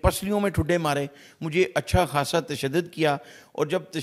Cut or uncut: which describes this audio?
uncut